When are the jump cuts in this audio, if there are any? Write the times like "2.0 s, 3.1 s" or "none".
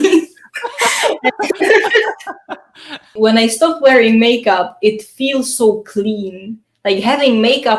3.1 s